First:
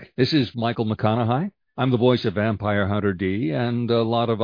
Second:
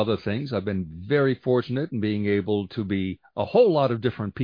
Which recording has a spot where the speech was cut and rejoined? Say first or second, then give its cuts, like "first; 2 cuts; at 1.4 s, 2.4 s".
first; 1 cut; at 1.6 s